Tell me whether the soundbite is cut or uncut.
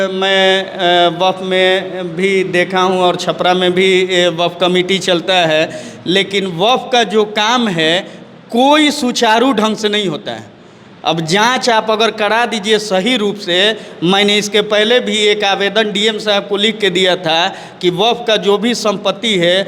uncut